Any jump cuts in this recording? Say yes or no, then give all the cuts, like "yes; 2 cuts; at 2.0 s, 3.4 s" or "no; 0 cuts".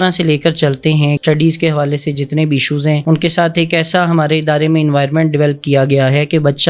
yes; 1 cut; at 1.2 s